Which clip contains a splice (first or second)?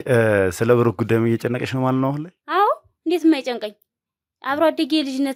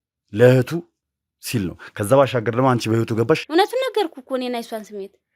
second